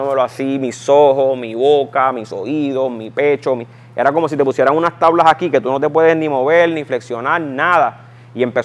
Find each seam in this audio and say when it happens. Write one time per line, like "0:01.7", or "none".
none